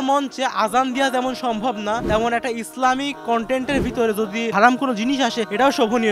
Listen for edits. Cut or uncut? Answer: uncut